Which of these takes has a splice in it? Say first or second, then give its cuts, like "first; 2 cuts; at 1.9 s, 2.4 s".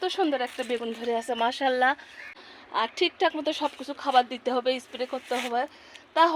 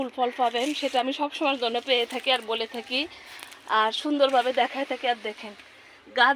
first; 1 cut; at 2.3 s